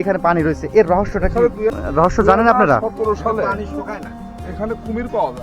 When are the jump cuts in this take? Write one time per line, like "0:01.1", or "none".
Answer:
0:01.7